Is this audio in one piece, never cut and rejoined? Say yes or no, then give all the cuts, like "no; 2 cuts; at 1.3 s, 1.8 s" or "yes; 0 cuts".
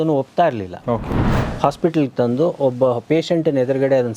no; 1 cut; at 1.3 s